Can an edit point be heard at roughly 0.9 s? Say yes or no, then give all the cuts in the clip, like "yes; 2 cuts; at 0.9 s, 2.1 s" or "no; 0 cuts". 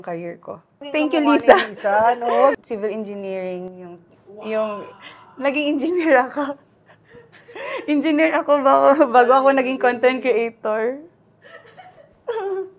yes; 2 cuts; at 0.9 s, 2.5 s